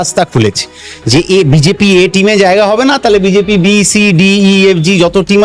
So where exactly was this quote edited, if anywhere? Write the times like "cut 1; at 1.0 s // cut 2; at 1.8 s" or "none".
none